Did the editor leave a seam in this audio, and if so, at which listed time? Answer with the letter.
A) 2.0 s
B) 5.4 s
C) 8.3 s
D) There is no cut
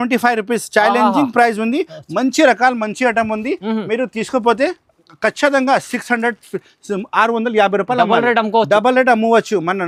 D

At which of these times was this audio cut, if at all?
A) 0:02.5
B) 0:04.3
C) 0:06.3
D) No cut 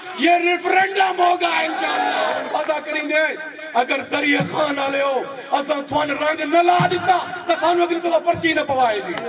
A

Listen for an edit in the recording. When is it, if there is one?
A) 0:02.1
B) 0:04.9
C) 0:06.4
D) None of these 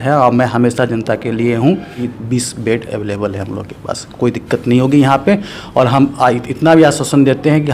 A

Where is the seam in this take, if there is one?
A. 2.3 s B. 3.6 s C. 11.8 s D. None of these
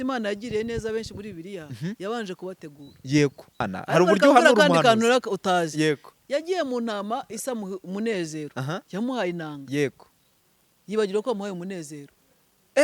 B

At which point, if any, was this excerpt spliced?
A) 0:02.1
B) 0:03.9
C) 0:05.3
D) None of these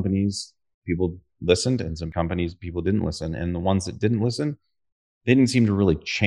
A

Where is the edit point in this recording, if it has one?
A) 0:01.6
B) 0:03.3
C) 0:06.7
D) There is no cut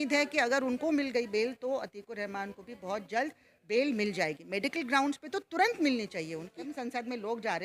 C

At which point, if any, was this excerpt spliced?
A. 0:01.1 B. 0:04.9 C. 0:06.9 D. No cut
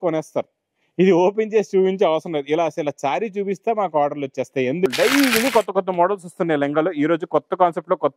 B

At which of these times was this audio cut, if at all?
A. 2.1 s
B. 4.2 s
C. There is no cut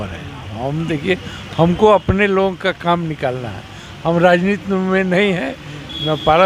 C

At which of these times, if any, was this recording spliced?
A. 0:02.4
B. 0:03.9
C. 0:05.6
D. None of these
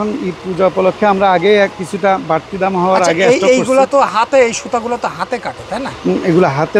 D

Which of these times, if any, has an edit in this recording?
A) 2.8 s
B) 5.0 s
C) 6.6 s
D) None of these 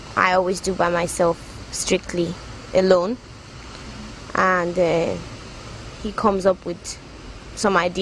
C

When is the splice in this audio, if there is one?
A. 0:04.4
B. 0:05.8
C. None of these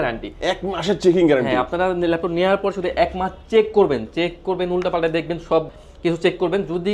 B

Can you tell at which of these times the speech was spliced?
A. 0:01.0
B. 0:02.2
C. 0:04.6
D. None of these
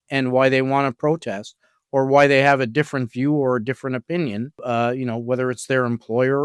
C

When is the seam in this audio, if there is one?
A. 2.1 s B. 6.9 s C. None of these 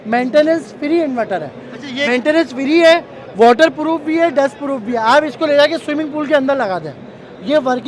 A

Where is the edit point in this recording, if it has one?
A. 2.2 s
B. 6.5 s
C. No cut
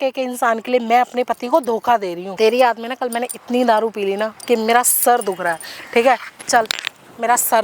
A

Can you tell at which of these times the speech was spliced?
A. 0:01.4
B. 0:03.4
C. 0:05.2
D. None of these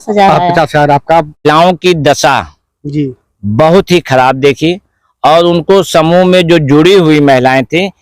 A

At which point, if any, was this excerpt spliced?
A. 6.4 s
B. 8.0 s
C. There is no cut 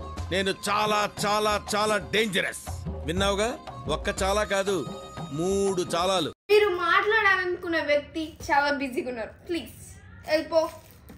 A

